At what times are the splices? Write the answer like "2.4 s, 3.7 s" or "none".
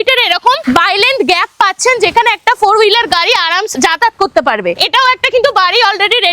3.7 s